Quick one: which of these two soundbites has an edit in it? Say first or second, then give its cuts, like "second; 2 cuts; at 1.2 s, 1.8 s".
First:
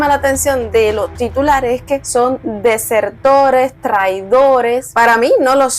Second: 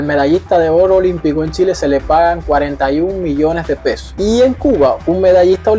first; 1 cut; at 4.9 s